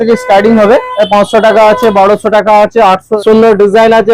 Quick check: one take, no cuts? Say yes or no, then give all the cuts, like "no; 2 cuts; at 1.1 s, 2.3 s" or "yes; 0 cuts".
no; 2 cuts; at 0.9 s, 3.1 s